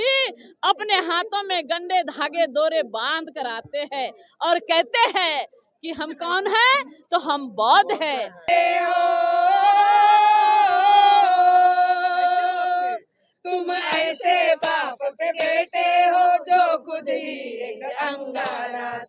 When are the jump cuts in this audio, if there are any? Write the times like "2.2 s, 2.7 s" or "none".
8.4 s